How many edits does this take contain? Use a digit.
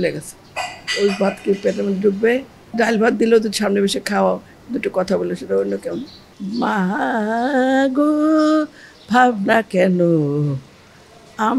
2